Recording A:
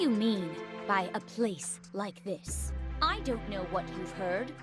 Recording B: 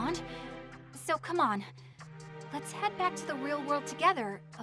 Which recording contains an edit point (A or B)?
A